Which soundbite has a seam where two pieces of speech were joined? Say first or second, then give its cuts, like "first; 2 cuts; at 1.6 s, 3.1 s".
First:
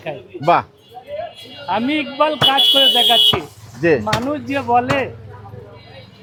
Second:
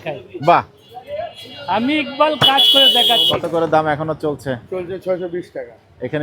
second; 1 cut; at 3.3 s